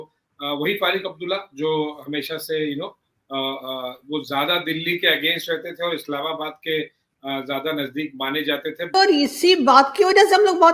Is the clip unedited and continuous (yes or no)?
no